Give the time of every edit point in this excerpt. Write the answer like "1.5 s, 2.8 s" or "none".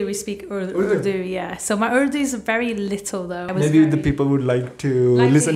3.4 s